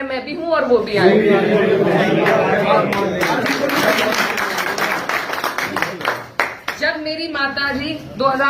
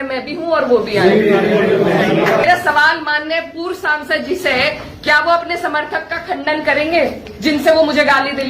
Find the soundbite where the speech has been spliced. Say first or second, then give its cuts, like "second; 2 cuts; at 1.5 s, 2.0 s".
second; 1 cut; at 2.4 s